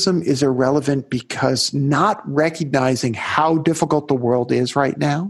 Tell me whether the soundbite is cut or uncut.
uncut